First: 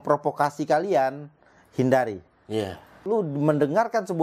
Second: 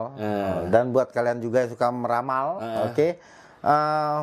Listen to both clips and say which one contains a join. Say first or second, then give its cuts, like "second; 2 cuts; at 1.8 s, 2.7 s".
first; 1 cut; at 3.0 s